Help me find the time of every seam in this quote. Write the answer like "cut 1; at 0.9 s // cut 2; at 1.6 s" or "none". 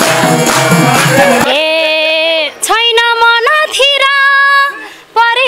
cut 1; at 1.5 s

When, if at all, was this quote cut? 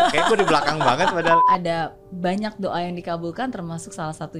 cut 1; at 1.4 s

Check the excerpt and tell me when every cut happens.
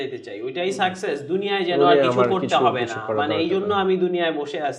none

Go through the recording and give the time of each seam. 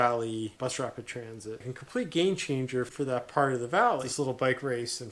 cut 1; at 1.6 s // cut 2; at 2.9 s // cut 3; at 4.1 s

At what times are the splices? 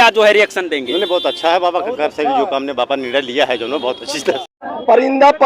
cut 1; at 4.5 s

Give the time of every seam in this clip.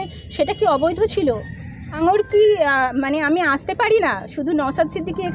cut 1; at 2.0 s

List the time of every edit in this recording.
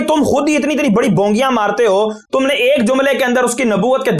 none

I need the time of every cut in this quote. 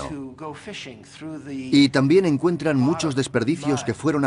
cut 1; at 2.9 s

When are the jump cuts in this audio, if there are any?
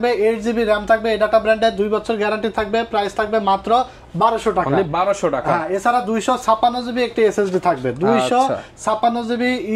none

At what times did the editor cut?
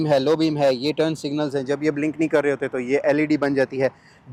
none

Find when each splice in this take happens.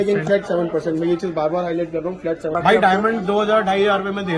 cut 1; at 2.5 s

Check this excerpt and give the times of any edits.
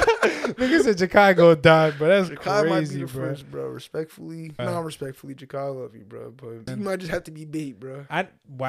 cut 1; at 4.6 s // cut 2; at 6.7 s

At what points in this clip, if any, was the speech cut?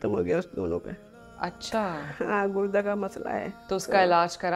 cut 1; at 3.6 s

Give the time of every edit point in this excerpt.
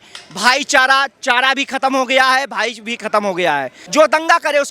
cut 1; at 3.8 s

